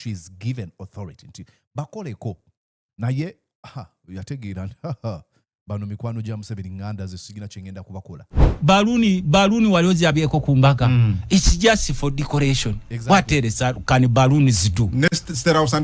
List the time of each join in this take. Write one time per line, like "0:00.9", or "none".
0:08.4